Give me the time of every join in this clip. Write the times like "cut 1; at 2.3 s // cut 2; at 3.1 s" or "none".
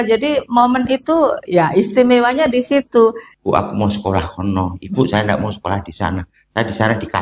cut 1; at 3.3 s